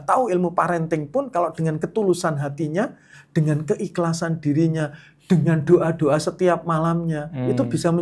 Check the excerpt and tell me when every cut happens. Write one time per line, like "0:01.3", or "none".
0:03.1